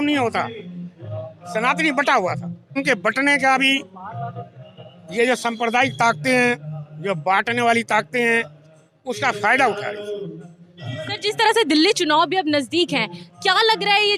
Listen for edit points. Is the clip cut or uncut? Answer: uncut